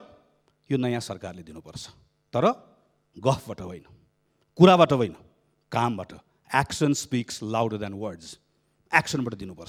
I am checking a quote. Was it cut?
no; 0 cuts

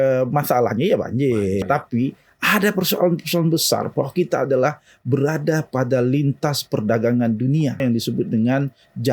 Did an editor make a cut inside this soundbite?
yes; 2 cuts; at 1.6 s, 7.8 s

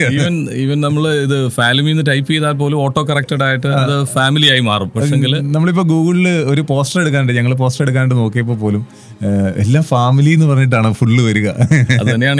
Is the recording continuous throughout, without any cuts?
yes; 0 cuts

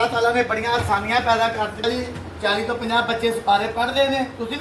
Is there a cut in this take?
yes; 1 cut; at 1.8 s

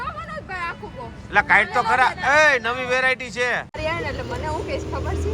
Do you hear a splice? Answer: yes; 1 cut; at 3.8 s

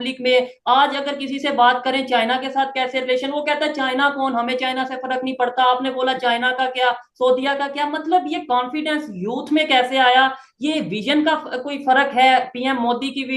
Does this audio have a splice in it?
no; 0 cuts

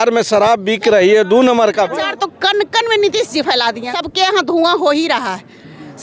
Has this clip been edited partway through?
yes; 2 cuts; at 2.0 s, 4.0 s

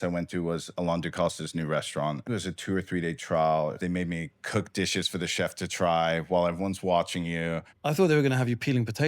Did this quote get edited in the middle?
yes; 3 cuts; at 2.3 s, 3.8 s, 7.7 s

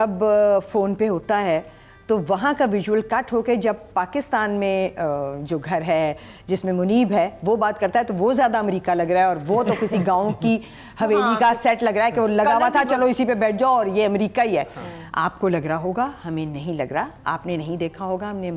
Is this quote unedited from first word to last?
yes; 0 cuts

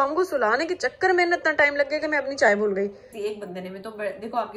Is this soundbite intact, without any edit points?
no; 1 cut; at 3.1 s

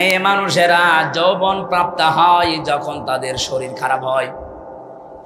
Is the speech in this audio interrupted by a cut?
no; 0 cuts

